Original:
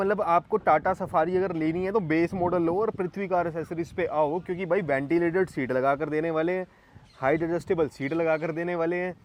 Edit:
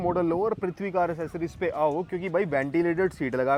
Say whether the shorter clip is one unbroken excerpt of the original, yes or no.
yes